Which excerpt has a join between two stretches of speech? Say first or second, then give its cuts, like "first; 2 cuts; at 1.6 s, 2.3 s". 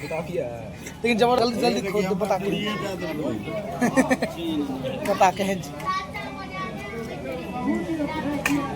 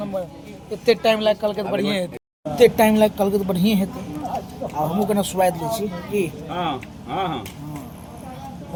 first; 1 cut; at 1.4 s